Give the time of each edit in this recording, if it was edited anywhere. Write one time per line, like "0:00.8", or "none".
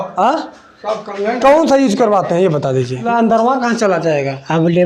0:03.1